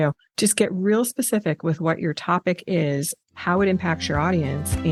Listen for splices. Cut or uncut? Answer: uncut